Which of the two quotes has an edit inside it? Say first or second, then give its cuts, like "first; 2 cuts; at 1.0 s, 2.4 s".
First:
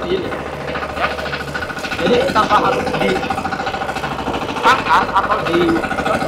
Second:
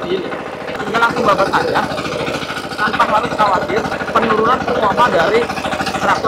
second; 2 cuts; at 0.8 s, 3.9 s